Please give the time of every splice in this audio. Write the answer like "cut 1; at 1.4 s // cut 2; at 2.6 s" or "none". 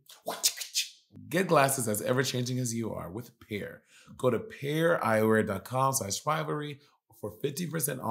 cut 1; at 1.0 s